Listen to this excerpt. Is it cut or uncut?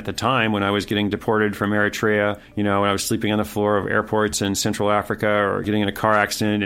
cut